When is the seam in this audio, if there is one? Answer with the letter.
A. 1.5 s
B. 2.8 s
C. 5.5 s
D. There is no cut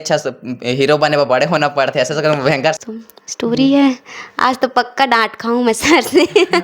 B